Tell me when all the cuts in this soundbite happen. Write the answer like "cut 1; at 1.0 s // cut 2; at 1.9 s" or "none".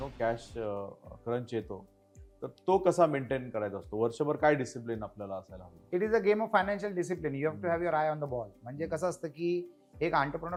none